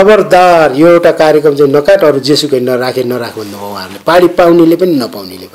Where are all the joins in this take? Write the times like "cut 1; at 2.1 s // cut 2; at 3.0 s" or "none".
none